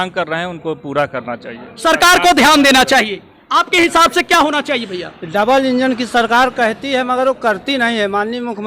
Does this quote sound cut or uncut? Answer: uncut